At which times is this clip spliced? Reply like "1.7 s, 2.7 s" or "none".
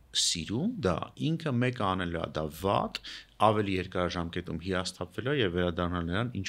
none